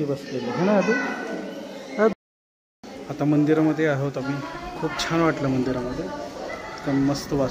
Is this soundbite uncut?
no; 1 cut; at 2.1 s

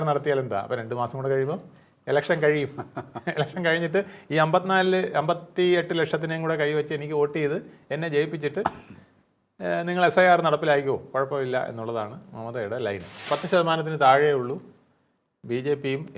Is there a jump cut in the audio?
yes; 1 cut; at 13.2 s

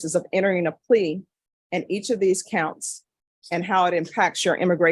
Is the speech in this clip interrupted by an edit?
no; 0 cuts

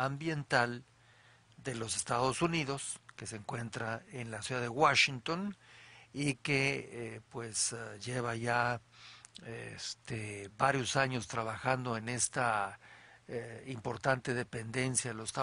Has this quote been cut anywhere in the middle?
no; 0 cuts

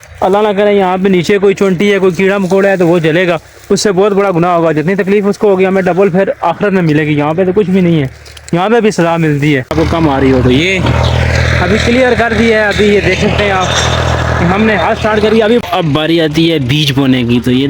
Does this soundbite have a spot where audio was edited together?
yes; 2 cuts; at 9.7 s, 15.6 s

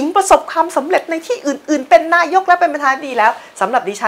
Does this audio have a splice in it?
no; 0 cuts

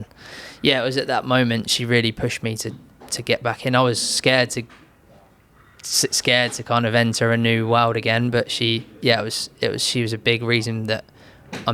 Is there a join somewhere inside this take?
no; 0 cuts

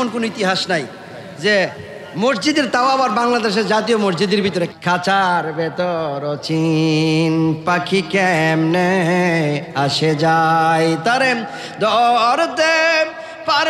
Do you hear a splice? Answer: yes; 1 cut; at 4.7 s

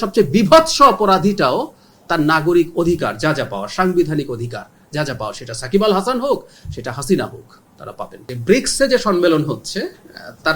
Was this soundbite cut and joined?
yes; 1 cut; at 8.2 s

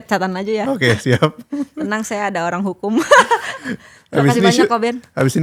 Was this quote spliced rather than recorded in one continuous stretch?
no; 0 cuts

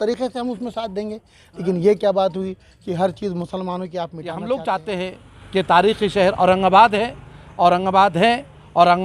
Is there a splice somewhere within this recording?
yes; 1 cut; at 4.2 s

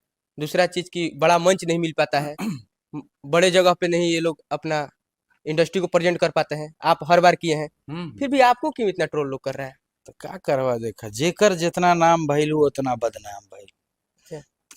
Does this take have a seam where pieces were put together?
no; 0 cuts

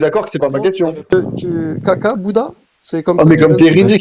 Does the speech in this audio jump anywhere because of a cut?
yes; 1 cut; at 1.1 s

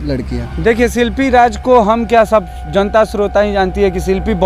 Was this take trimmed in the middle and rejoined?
no; 0 cuts

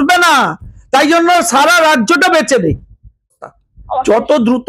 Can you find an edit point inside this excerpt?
yes; 1 cut; at 3.3 s

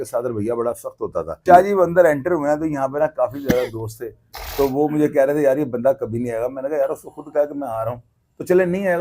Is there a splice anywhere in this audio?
yes; 1 cut; at 1.4 s

